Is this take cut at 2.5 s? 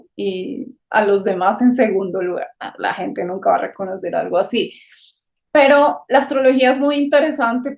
no; 0 cuts

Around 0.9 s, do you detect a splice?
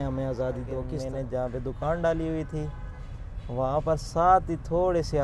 yes; 1 cut; at 0.9 s

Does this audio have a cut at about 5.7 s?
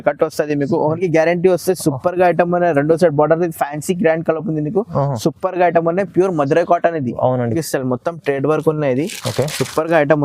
no; 2 cuts; at 1.0 s, 7.6 s

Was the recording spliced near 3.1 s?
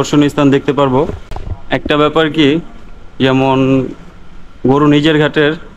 no; 1 cut; at 1.3 s

